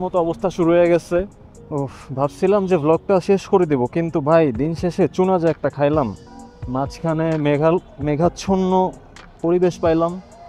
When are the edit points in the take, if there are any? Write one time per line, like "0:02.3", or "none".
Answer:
0:01.6
0:06.2

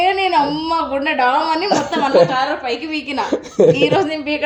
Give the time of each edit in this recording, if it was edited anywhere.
none

